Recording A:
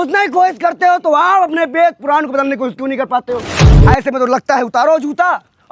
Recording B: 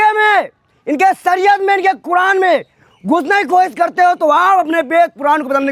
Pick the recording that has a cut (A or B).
A